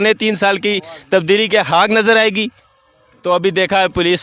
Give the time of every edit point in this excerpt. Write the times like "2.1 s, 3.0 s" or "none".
2.5 s